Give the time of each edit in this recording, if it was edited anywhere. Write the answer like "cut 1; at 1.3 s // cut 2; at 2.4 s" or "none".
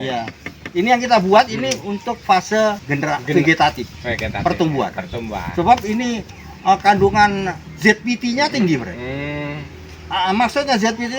cut 1; at 2.9 s